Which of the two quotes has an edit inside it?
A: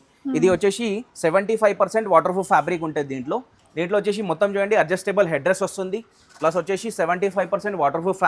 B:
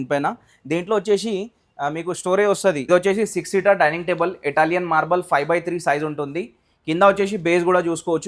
B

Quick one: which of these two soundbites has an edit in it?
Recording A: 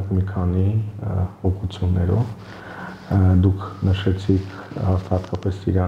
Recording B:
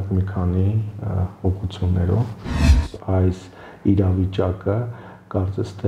B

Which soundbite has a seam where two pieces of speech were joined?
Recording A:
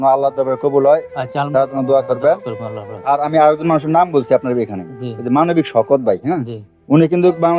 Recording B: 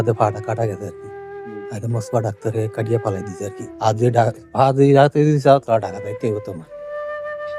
B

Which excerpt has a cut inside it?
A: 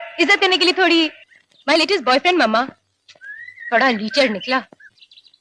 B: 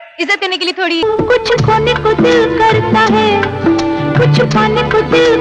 B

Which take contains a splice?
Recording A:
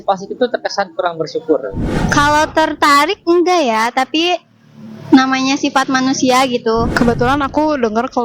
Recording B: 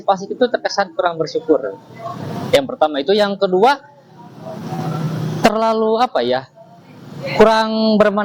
A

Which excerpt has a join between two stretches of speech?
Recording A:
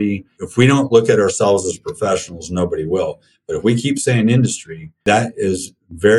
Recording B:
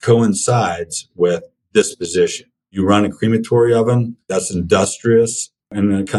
B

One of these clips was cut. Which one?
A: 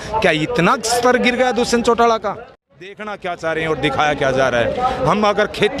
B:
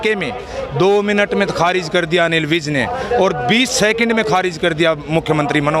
A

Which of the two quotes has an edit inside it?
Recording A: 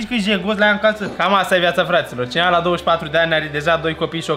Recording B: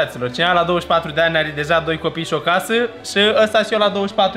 A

